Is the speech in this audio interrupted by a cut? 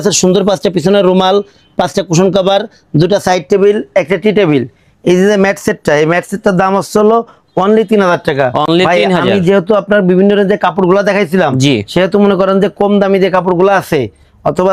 no; 0 cuts

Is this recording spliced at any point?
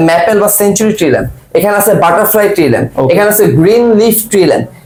no; 0 cuts

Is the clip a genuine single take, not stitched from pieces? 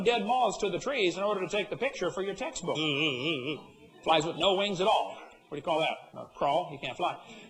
yes; 0 cuts

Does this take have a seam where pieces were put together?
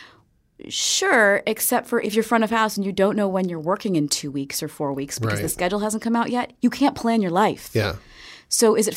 yes; 1 cut; at 2.1 s

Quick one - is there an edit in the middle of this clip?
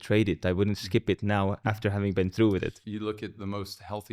yes; 2 cuts; at 1.6 s, 2.8 s

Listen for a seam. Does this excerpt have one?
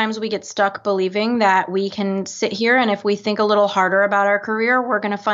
no; 0 cuts

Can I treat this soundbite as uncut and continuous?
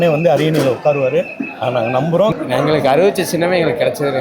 yes; 0 cuts

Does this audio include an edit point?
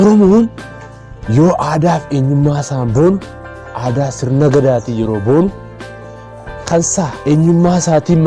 no; 0 cuts

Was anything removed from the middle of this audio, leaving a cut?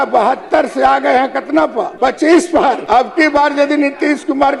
yes; 2 cuts; at 1.9 s, 2.8 s

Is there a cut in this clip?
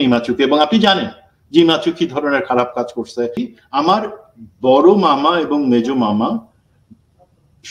yes; 1 cut; at 3.5 s

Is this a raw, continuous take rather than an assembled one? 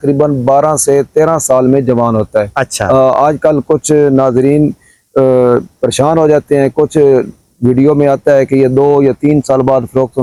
yes; 0 cuts

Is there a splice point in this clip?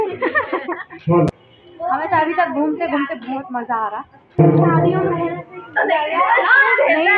yes; 2 cuts; at 1.3 s, 4.4 s

